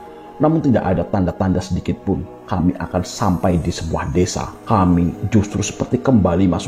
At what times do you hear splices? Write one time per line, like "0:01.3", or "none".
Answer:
0:04.5